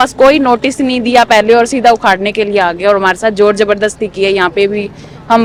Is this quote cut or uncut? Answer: uncut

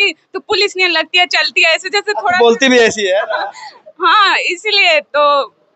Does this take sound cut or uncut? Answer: uncut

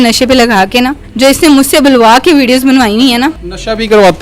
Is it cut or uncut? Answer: cut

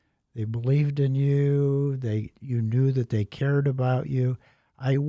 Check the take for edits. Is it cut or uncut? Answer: uncut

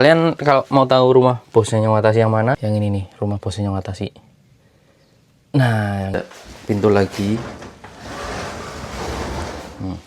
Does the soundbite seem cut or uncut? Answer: cut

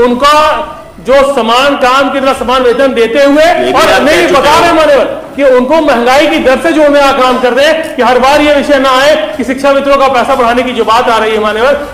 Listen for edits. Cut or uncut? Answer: uncut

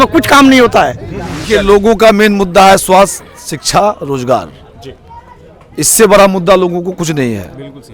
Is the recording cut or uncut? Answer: cut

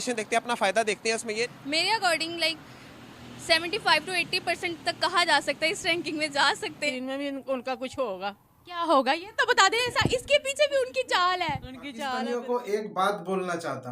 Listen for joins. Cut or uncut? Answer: cut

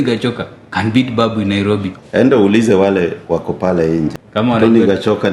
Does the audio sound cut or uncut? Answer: cut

